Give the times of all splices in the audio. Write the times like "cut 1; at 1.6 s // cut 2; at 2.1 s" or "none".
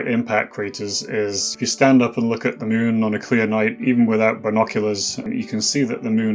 cut 1; at 1.5 s // cut 2; at 5.2 s